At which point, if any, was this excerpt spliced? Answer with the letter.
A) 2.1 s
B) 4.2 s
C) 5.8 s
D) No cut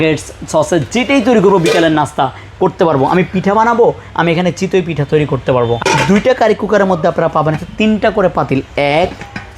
C